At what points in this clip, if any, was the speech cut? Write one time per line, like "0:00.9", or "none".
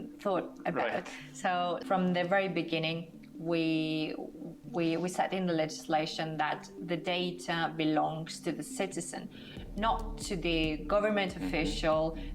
0:01.8